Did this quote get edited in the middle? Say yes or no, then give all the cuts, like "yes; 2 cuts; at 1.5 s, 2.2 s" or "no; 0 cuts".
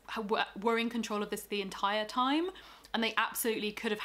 no; 0 cuts